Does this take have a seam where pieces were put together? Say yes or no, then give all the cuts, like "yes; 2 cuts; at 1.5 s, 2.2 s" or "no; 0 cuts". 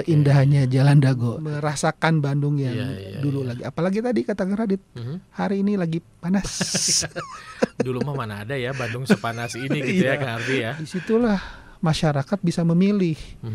yes; 2 cuts; at 1.4 s, 11.2 s